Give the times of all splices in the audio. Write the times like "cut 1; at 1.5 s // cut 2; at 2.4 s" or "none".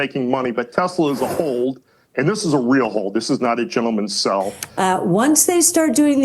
cut 1; at 4.6 s